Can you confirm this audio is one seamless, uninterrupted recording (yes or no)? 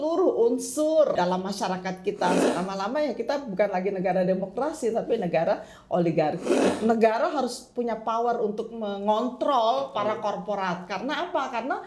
no